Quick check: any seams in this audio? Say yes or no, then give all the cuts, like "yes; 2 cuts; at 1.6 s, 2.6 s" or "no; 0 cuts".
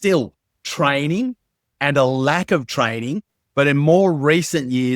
yes; 1 cut; at 3.3 s